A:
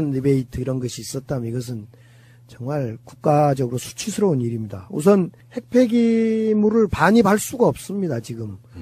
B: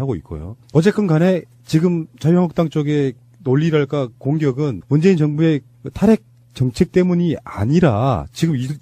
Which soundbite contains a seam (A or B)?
A